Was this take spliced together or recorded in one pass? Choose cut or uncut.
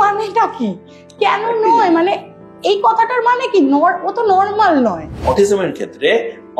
cut